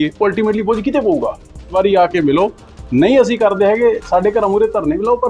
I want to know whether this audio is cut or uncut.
cut